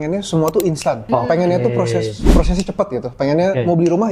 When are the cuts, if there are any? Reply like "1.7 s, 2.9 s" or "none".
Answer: 1.0 s